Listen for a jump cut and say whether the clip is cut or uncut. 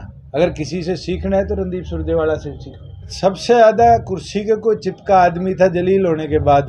cut